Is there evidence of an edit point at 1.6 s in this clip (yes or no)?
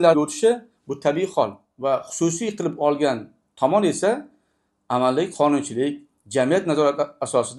yes